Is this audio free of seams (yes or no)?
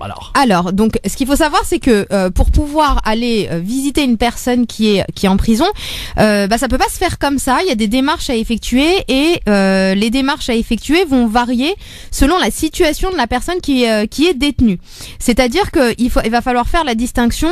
yes